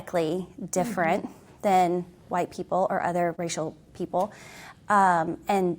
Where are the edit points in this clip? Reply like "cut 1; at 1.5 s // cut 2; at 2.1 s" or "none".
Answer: cut 1; at 3.4 s